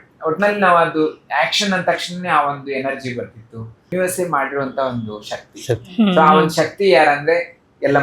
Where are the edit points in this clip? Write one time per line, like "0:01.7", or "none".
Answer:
0:03.9